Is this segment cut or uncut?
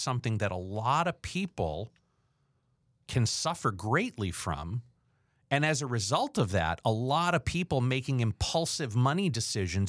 uncut